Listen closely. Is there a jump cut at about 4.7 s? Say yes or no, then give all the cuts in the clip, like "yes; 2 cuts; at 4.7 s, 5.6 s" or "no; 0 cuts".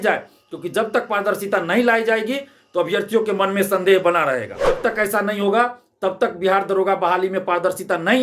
yes; 1 cut; at 4.7 s